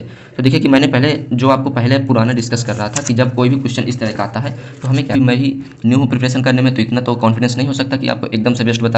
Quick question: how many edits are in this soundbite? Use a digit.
1